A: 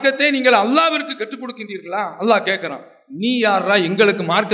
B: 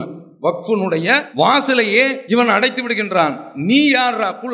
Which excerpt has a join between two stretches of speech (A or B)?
B